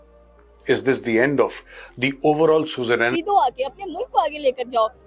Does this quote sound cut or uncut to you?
cut